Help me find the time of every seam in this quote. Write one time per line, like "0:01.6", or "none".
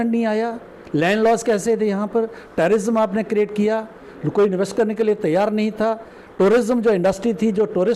none